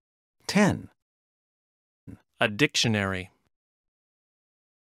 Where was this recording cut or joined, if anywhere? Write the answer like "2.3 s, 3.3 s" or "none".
none